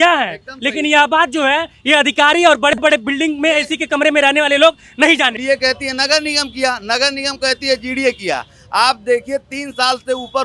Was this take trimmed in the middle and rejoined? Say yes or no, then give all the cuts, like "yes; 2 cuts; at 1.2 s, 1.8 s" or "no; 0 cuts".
yes; 1 cut; at 5.4 s